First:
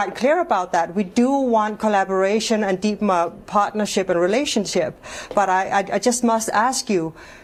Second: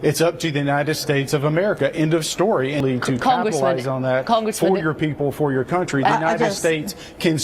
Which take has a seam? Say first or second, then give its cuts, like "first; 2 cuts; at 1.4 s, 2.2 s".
second; 1 cut; at 2.8 s